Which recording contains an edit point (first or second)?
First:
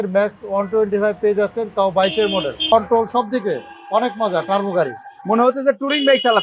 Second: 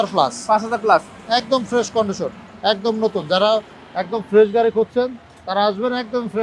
first